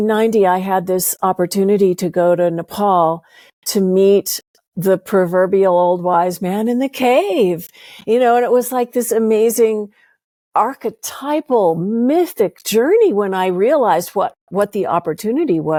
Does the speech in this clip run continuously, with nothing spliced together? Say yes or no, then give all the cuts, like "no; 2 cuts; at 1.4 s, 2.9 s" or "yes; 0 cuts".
yes; 0 cuts